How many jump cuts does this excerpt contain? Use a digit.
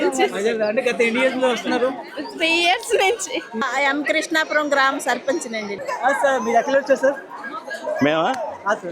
1